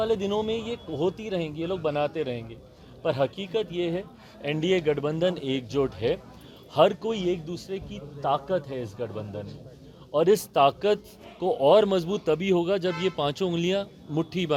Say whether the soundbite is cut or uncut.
uncut